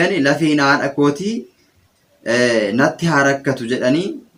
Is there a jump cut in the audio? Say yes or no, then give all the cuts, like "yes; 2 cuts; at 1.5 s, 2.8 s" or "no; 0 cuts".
no; 0 cuts